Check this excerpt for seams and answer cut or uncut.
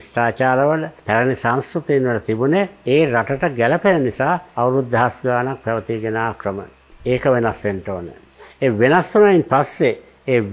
uncut